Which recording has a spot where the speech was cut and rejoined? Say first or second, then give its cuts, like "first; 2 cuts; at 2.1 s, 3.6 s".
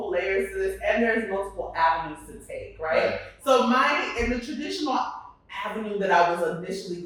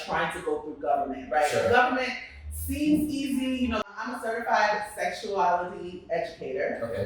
second; 1 cut; at 3.8 s